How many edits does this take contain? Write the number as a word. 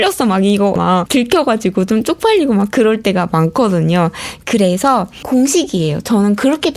zero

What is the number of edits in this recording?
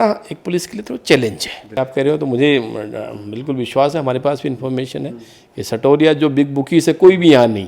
one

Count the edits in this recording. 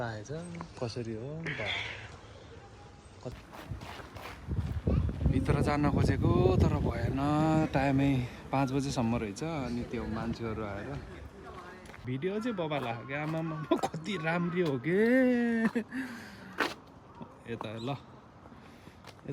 two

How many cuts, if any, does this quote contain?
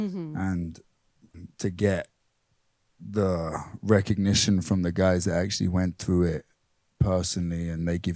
one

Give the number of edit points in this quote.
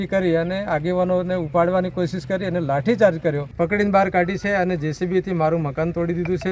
one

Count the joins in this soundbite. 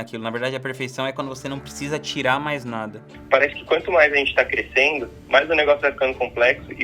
two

